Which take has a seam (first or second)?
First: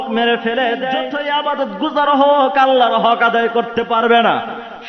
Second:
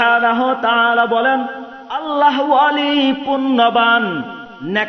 first